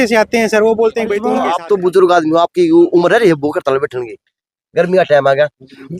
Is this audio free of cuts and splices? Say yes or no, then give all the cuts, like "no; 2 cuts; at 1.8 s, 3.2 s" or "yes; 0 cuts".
no; 1 cut; at 1.3 s